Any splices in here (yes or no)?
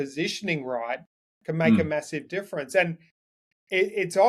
no